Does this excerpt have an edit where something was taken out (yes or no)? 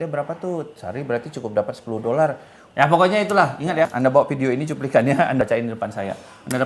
yes